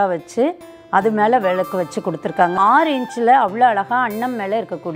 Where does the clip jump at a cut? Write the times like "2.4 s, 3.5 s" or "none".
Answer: 2.6 s